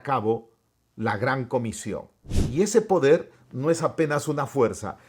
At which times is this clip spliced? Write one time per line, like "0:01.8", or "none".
0:02.3